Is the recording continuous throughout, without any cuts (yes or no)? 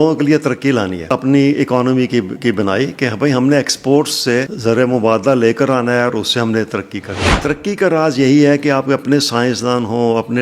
no